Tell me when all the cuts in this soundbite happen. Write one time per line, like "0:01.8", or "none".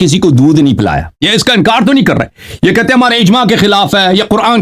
0:01.1